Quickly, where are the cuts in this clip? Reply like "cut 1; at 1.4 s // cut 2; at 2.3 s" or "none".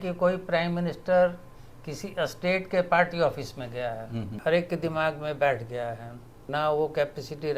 cut 1; at 4.3 s // cut 2; at 6.4 s